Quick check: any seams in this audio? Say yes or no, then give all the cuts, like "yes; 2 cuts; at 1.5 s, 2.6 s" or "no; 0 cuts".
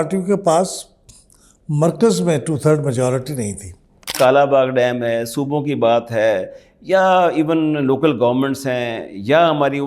yes; 1 cut; at 4.1 s